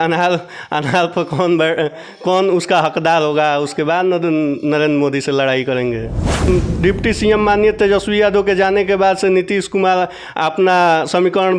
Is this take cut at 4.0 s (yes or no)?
no